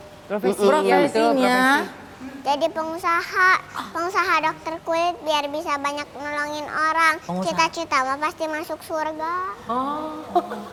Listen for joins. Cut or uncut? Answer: uncut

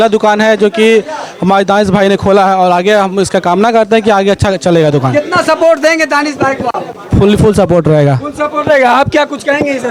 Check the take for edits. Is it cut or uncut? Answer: uncut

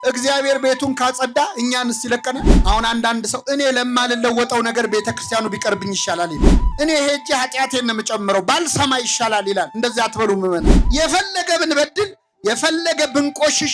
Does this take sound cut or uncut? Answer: cut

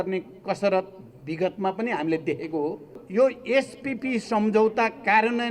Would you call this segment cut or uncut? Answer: cut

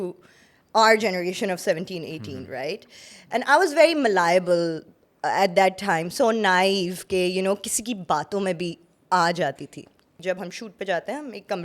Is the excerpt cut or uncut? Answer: cut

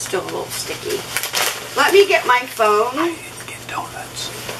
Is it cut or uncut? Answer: uncut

